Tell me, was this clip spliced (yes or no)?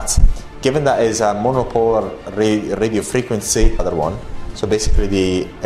yes